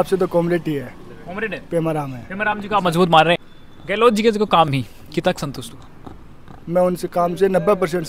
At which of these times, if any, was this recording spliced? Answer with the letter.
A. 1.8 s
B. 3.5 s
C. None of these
C